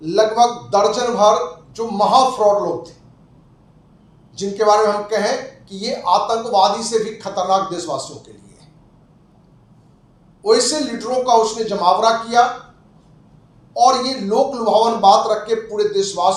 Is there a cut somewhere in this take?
no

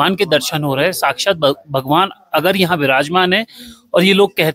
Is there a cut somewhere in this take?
no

